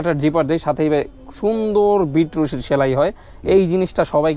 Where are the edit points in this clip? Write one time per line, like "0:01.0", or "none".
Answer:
none